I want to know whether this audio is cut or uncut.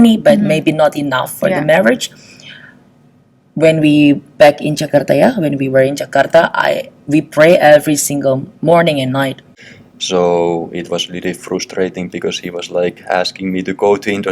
cut